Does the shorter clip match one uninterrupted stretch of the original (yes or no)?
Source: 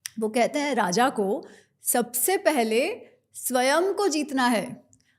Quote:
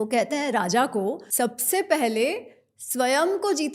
no